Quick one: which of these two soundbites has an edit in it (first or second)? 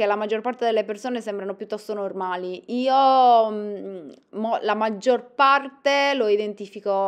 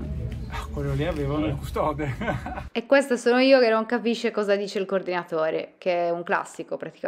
second